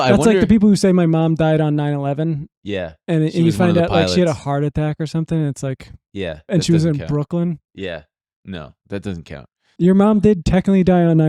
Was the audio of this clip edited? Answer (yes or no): yes